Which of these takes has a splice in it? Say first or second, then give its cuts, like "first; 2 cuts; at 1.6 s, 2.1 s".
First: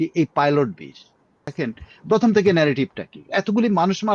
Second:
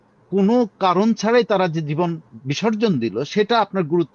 first; 1 cut; at 1.5 s